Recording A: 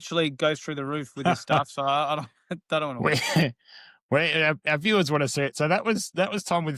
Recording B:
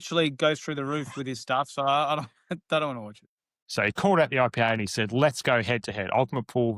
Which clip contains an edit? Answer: B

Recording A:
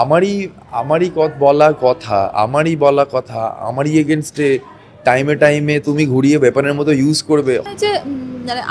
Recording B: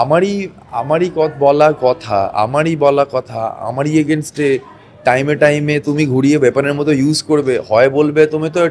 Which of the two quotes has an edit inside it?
A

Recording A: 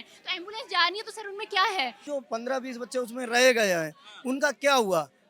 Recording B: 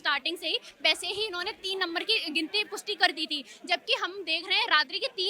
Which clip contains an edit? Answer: A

